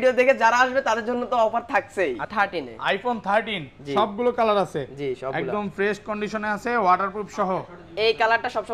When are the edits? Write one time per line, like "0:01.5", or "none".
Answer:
0:02.3